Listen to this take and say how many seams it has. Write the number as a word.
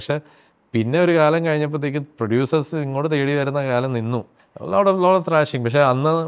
one